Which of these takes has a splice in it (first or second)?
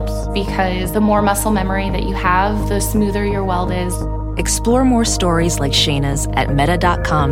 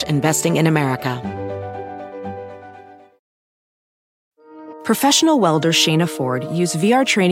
second